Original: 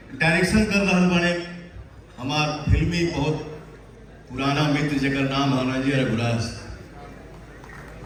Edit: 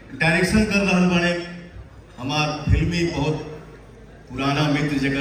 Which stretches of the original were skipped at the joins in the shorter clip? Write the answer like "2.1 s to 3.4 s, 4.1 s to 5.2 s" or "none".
none